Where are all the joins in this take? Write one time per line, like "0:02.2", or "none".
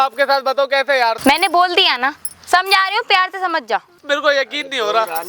0:01.2
0:04.0